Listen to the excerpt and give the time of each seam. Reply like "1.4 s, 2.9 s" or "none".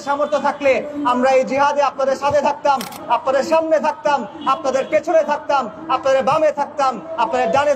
none